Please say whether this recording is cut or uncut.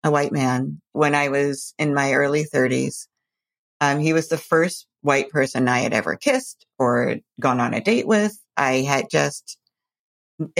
cut